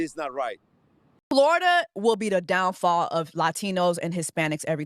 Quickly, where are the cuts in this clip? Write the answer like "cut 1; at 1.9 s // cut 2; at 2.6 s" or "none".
cut 1; at 1.1 s